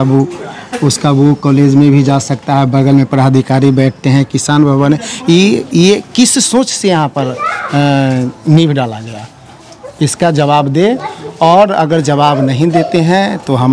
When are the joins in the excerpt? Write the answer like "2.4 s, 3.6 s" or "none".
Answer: none